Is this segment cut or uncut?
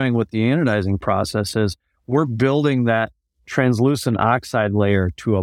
uncut